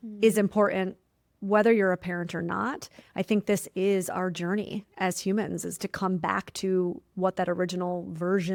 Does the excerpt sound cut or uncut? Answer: uncut